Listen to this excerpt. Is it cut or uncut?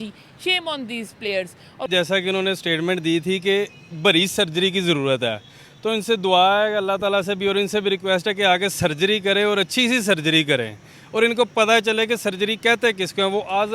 cut